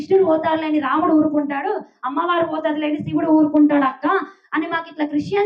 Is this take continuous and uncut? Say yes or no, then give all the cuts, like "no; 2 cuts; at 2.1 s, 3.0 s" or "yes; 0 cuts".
yes; 0 cuts